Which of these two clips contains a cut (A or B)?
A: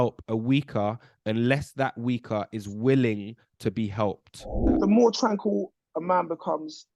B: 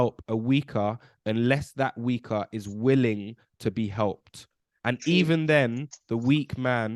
A